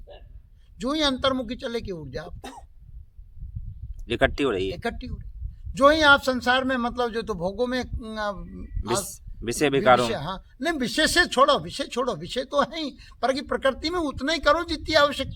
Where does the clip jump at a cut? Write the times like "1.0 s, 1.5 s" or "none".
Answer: none